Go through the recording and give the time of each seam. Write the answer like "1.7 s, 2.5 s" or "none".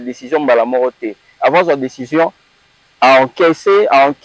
none